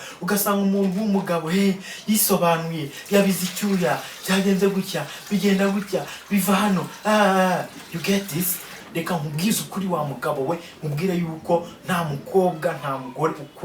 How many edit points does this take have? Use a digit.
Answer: 1